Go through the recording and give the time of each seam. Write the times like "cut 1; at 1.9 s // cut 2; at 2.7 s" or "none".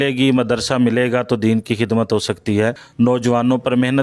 cut 1; at 2.8 s